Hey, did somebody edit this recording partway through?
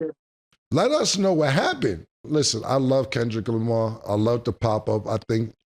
yes; 1 cut; at 2.2 s

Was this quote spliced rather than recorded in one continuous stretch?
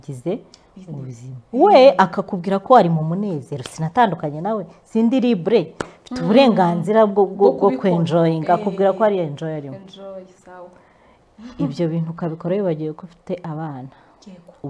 no; 0 cuts

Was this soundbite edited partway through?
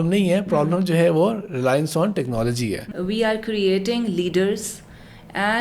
yes; 1 cut; at 2.9 s

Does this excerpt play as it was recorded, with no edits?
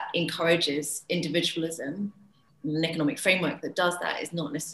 yes; 0 cuts

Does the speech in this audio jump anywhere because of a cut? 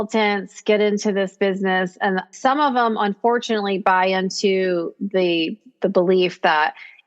yes; 1 cut; at 2.2 s

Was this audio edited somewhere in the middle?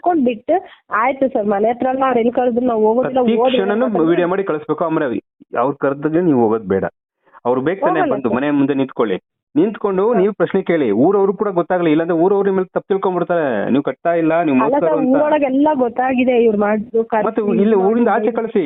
no; 0 cuts

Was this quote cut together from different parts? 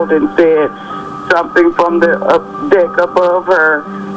no; 0 cuts

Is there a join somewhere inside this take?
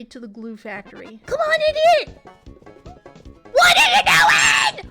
yes; 1 cut; at 1.2 s

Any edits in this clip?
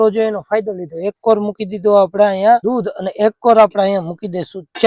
no; 0 cuts

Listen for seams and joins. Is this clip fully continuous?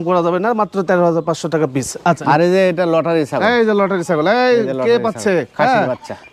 no; 1 cut; at 2.2 s

